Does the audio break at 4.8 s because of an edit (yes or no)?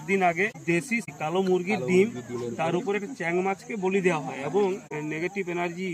yes